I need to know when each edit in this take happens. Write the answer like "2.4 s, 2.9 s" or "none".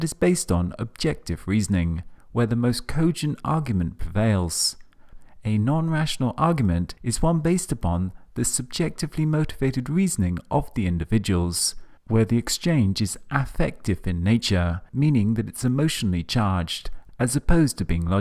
11.2 s